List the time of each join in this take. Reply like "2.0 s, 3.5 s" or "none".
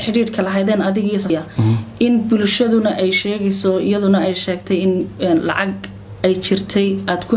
1.3 s